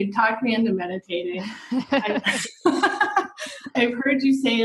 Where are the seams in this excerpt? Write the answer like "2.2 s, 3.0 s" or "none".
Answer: 3.7 s

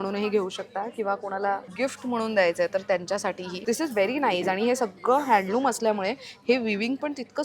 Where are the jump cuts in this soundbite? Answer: 1.7 s, 3.5 s

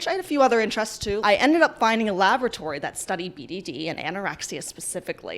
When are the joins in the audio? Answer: 1.2 s

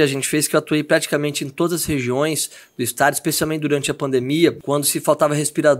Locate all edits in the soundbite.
4.6 s

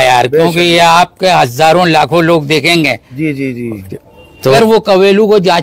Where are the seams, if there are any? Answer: 4.5 s

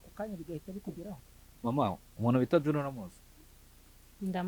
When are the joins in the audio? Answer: 1.4 s

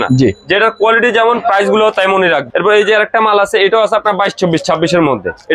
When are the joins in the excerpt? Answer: none

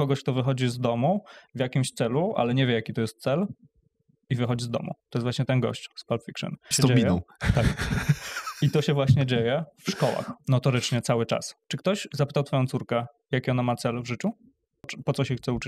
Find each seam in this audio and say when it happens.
5.0 s, 6.7 s, 10.4 s, 11.6 s, 14.9 s

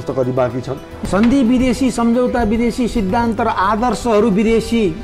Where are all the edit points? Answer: 0.9 s

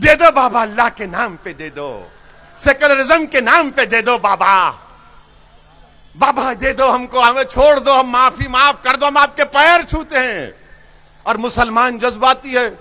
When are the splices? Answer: none

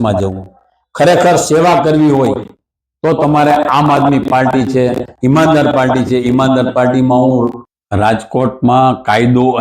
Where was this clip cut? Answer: 7.7 s

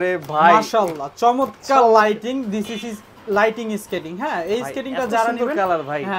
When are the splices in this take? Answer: none

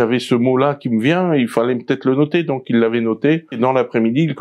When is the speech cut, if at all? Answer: 3.5 s

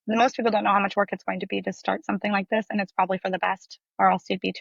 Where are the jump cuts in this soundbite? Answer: none

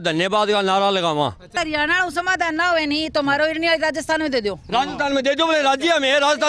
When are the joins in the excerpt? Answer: 1.5 s

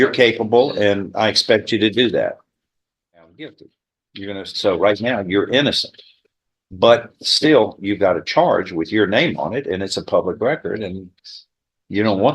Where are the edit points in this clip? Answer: 3.3 s

